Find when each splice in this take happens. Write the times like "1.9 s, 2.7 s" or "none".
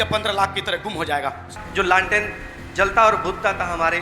1.6 s